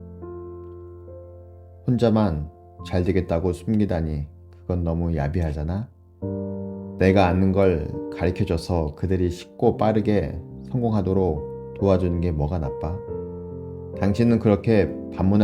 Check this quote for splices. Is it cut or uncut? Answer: cut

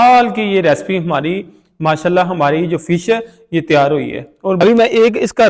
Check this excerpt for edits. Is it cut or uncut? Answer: cut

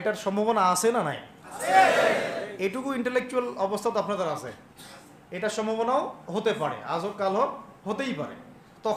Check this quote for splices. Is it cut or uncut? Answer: uncut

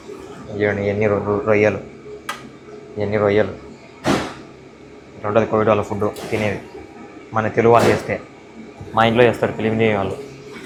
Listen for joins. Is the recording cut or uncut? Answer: uncut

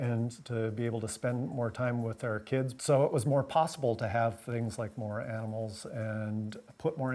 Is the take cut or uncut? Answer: cut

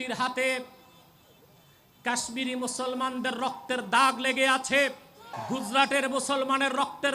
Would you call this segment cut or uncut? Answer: cut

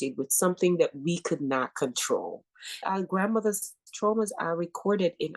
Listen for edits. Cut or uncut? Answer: cut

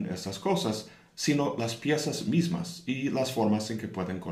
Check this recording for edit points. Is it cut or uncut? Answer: cut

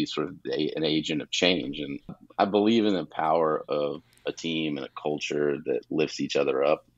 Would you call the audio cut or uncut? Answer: cut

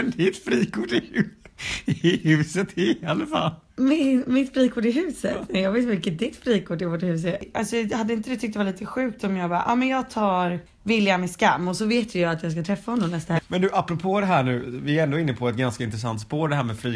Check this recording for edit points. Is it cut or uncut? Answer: cut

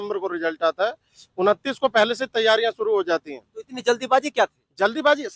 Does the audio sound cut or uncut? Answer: uncut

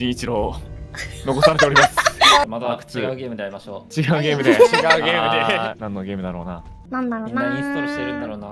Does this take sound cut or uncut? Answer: cut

